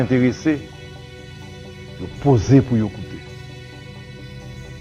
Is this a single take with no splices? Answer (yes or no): yes